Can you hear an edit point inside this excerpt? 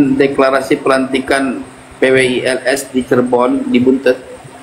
no; 0 cuts

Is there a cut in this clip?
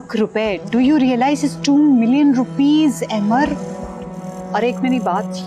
no; 0 cuts

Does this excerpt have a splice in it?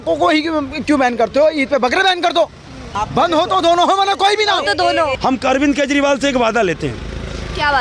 yes; 2 cuts; at 2.8 s, 5.2 s

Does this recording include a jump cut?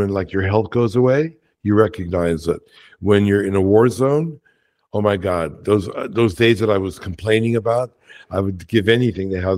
no; 0 cuts

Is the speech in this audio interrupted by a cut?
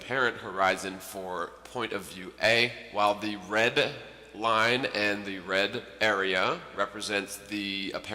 yes; 1 cut; at 2.0 s

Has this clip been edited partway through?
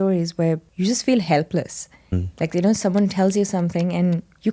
no; 0 cuts

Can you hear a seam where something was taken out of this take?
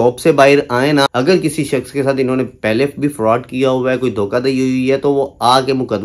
yes; 1 cut; at 1.1 s

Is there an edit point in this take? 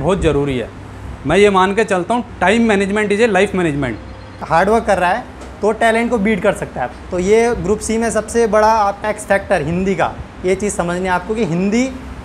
yes; 3 cuts; at 4.4 s, 6.8 s, 9.0 s

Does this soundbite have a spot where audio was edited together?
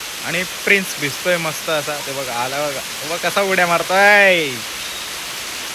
no; 0 cuts

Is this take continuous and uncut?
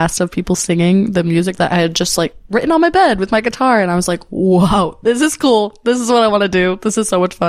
yes; 0 cuts

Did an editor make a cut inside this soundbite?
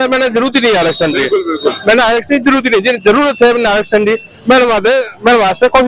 no; 0 cuts

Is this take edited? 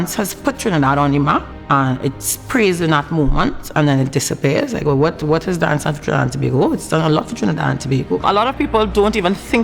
yes; 2 cuts; at 1.5 s, 8.2 s

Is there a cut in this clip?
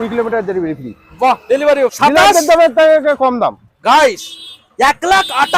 yes; 1 cut; at 1.9 s

